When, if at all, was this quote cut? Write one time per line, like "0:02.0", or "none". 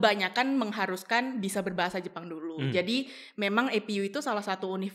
none